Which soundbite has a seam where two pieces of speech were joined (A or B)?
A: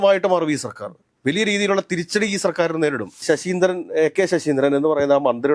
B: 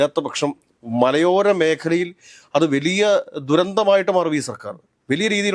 A